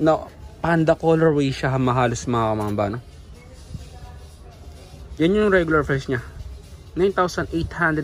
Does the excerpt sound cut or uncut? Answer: uncut